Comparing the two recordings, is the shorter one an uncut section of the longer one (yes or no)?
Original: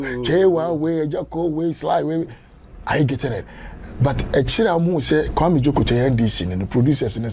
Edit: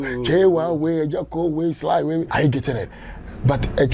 no